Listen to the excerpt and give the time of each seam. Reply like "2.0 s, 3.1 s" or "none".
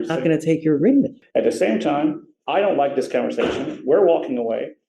1.2 s

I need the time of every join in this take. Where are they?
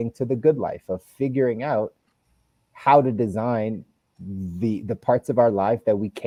none

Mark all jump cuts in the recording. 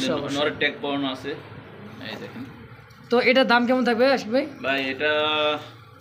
none

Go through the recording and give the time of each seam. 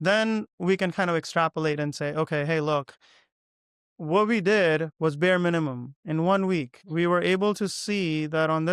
6.8 s

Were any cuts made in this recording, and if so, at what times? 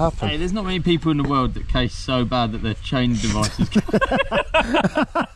none

